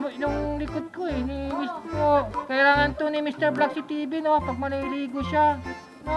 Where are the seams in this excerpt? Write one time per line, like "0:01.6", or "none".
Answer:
0:02.0